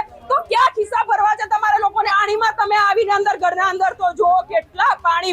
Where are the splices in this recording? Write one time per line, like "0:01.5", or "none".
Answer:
0:02.1